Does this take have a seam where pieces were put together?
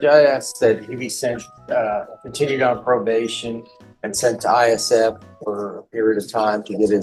no; 0 cuts

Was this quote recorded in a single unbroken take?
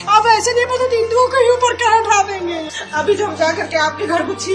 no; 1 cut; at 2.4 s

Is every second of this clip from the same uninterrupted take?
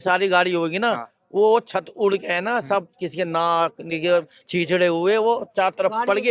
yes; 0 cuts

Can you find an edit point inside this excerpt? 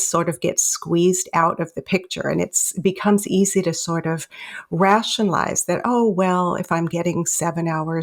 no; 0 cuts

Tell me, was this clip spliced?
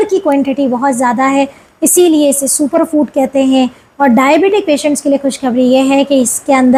no; 0 cuts

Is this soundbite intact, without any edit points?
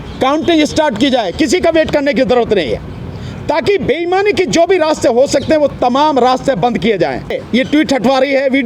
no; 1 cut; at 7.4 s

